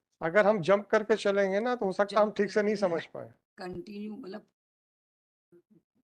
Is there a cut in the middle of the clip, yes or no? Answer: no